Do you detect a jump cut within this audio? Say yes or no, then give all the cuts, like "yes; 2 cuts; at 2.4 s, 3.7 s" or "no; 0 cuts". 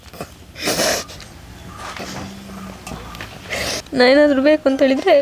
yes; 1 cut; at 3.9 s